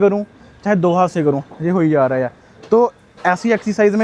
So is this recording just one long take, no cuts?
yes; 0 cuts

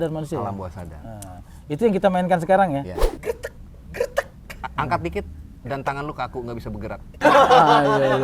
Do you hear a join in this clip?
yes; 2 cuts; at 3.0 s, 7.2 s

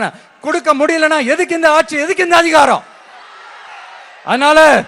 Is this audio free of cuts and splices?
yes; 0 cuts

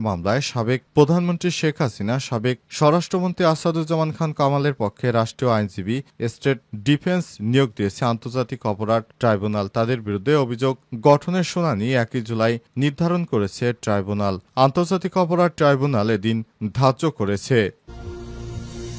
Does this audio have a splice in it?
yes; 1 cut; at 17.8 s

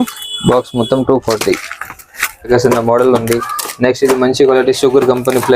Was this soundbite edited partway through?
yes; 1 cut; at 2.5 s

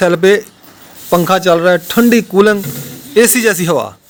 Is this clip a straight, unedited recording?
yes; 0 cuts

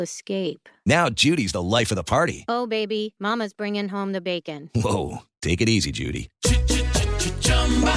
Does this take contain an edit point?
no; 0 cuts

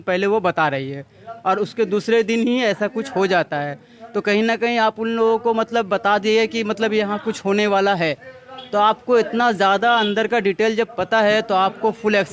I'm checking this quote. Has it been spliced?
no; 0 cuts

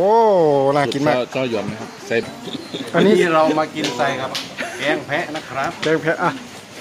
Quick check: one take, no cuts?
no; 1 cut; at 2.2 s

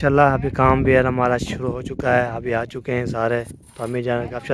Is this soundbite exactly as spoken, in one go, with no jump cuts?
yes; 0 cuts

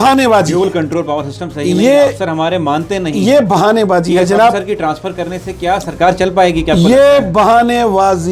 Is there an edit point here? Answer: no; 0 cuts

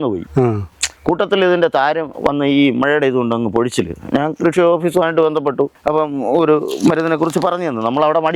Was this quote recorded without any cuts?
yes; 0 cuts

